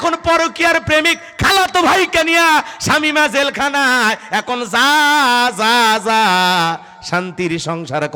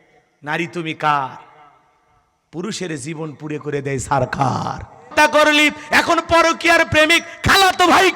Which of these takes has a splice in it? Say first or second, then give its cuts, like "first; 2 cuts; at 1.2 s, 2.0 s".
second; 1 cut; at 5.0 s